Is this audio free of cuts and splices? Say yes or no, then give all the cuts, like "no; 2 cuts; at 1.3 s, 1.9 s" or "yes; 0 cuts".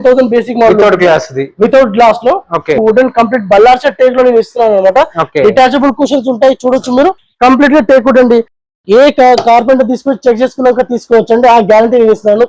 no; 1 cut; at 2.8 s